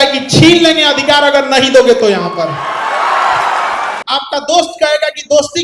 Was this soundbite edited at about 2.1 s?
no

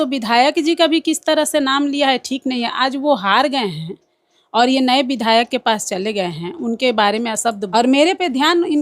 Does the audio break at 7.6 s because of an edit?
yes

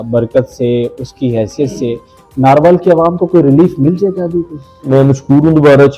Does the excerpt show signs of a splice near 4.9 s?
yes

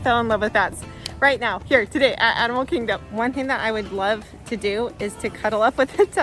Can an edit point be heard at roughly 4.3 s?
no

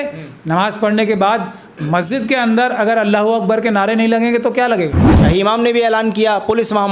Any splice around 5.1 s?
yes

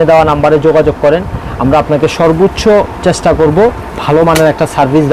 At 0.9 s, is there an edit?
no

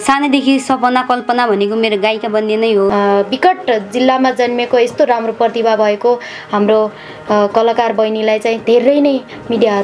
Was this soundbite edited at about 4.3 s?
no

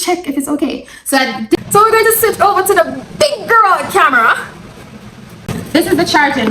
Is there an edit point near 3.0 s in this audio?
no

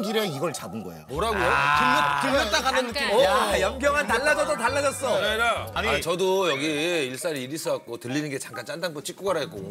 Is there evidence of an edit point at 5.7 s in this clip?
yes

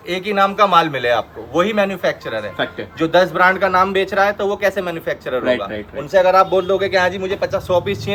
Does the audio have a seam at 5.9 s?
no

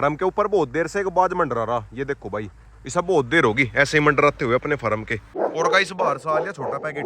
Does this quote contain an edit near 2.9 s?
no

